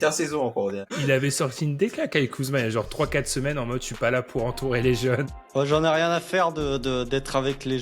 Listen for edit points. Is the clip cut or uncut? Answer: cut